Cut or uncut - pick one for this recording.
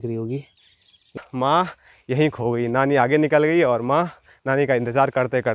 cut